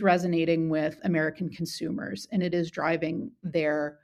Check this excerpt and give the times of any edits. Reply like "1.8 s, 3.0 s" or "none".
none